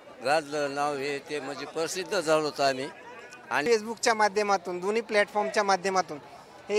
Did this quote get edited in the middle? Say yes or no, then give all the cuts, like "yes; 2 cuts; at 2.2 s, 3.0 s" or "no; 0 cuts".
yes; 1 cut; at 3.6 s